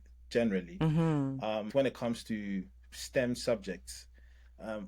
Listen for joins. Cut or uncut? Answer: cut